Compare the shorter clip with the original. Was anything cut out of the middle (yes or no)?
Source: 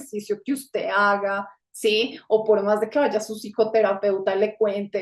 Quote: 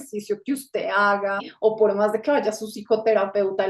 yes